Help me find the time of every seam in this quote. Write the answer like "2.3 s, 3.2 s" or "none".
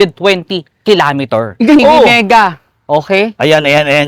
1.8 s